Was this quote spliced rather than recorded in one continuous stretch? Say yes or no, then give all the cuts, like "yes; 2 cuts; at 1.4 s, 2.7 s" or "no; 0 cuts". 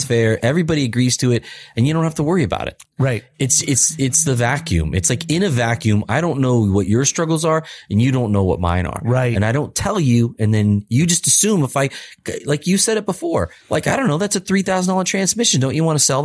no; 0 cuts